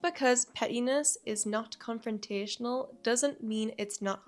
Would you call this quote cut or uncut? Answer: uncut